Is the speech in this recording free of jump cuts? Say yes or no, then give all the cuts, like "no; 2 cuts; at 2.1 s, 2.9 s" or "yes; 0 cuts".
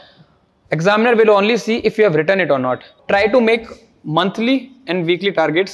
no; 1 cut; at 2.9 s